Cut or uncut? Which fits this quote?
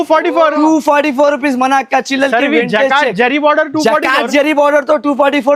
uncut